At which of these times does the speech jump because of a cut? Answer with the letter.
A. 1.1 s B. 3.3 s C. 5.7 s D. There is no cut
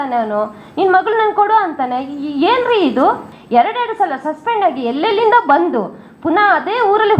B